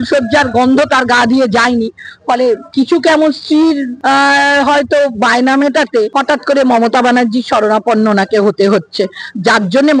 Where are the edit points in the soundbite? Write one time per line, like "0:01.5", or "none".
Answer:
0:02.7
0:03.9
0:06.1